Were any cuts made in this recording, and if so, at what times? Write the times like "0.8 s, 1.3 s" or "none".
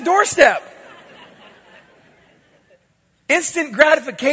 2.7 s